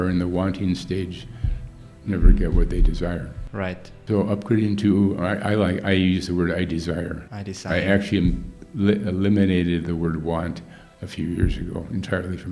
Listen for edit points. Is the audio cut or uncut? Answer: uncut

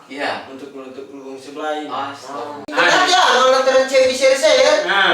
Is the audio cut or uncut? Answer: cut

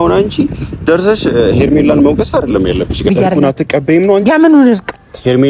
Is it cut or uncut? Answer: cut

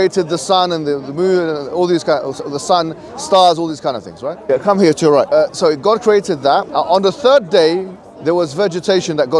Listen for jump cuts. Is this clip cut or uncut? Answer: cut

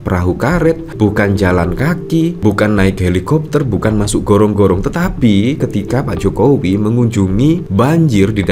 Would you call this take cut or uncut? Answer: uncut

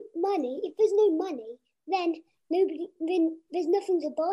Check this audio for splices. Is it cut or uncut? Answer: uncut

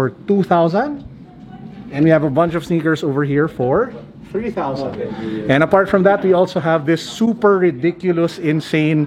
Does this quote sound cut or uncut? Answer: uncut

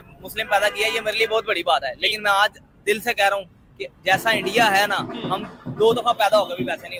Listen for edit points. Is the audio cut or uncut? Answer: uncut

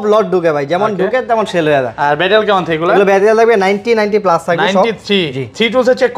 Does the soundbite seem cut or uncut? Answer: uncut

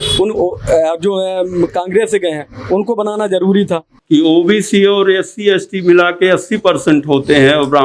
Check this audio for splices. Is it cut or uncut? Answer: cut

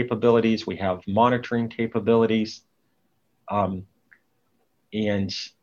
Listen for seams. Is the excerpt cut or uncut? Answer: uncut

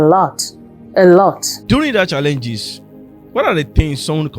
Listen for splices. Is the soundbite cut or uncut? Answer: cut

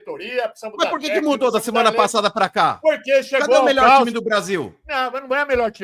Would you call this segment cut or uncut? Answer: uncut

